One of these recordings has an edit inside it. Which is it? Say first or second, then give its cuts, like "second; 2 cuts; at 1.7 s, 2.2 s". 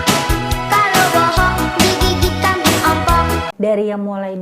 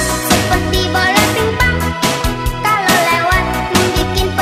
first; 1 cut; at 3.5 s